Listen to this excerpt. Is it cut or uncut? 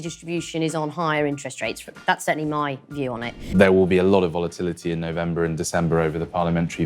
cut